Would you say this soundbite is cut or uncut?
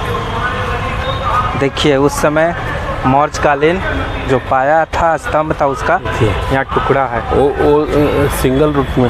uncut